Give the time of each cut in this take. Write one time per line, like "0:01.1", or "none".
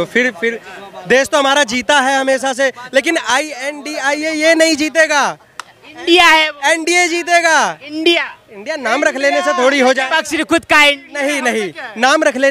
none